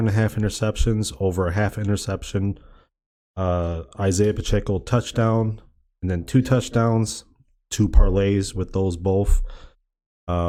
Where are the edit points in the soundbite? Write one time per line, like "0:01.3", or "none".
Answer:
none